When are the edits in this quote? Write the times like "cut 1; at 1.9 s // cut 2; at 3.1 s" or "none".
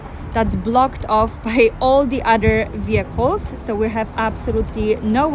none